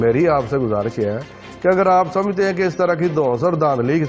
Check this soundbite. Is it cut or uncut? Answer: uncut